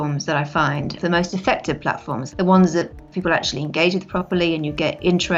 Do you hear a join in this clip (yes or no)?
yes